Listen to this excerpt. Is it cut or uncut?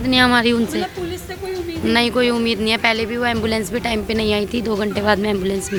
uncut